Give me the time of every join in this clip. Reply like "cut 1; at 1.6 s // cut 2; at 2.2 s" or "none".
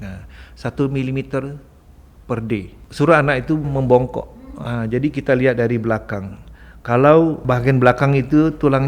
cut 1; at 2.8 s // cut 2; at 3.7 s // cut 3; at 7.4 s